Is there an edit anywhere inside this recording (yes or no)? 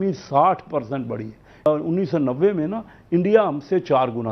yes